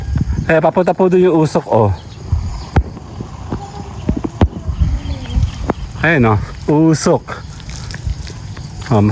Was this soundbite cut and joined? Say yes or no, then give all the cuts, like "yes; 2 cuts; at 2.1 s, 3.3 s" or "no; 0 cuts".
no; 0 cuts